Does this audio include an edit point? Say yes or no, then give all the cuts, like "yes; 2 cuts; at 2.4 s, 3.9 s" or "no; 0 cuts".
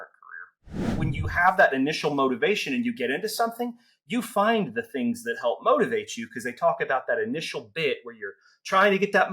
yes; 1 cut; at 1.0 s